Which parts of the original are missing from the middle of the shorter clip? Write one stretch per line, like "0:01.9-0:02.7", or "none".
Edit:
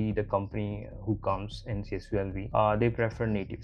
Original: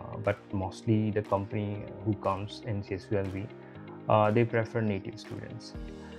0:03.4-0:04.0